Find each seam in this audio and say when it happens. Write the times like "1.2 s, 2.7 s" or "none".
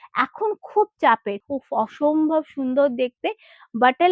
1.5 s